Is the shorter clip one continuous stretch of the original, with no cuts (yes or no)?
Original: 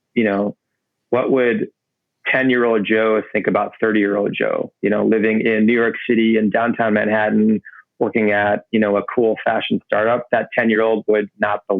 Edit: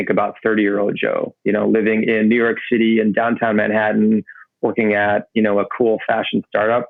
yes